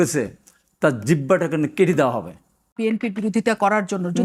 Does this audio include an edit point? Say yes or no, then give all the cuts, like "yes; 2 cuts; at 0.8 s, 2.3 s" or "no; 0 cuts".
yes; 1 cut; at 2.8 s